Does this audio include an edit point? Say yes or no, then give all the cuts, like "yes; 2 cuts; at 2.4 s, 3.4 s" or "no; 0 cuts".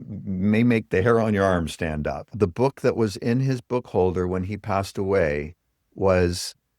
yes; 1 cut; at 2.3 s